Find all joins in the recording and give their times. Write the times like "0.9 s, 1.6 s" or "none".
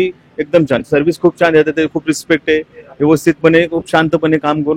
none